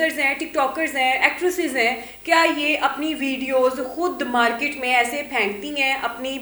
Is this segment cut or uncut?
uncut